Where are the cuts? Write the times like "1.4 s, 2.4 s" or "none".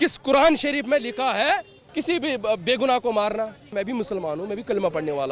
1.8 s, 3.8 s